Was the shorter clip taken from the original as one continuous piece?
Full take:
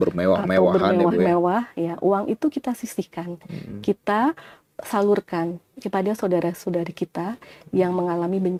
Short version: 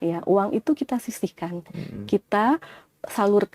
yes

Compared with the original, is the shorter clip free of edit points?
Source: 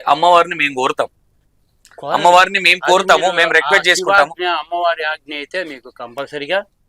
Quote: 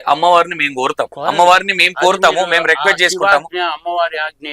no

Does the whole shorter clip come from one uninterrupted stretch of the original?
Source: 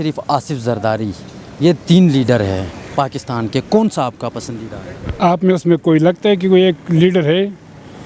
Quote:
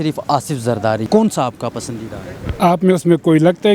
no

